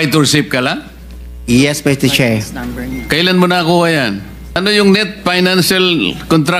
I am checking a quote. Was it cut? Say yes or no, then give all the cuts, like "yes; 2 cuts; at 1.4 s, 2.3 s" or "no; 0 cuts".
yes; 1 cut; at 4.4 s